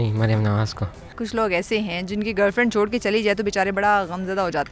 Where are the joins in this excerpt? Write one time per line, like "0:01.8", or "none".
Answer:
0:01.1